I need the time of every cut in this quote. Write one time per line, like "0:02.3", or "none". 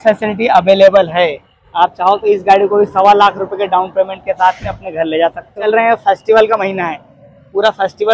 0:05.7